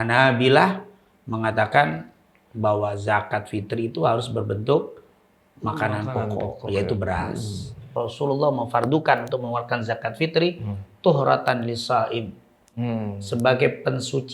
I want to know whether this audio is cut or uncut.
cut